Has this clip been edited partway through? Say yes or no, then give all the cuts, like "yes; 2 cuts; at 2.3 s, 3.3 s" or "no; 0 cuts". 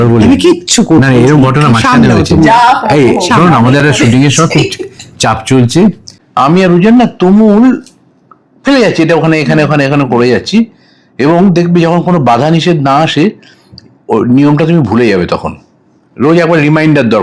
no; 0 cuts